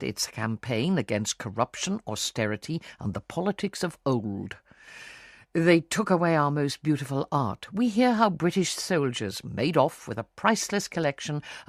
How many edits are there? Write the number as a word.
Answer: one